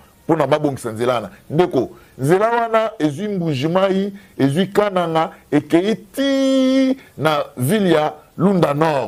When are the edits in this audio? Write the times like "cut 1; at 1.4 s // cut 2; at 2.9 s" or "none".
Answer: none